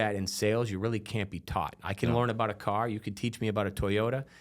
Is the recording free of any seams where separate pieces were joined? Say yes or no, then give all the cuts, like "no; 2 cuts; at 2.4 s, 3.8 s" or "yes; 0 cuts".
yes; 0 cuts